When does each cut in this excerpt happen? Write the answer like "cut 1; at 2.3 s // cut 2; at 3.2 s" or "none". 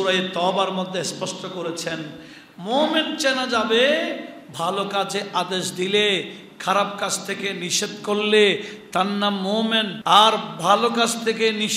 cut 1; at 10.0 s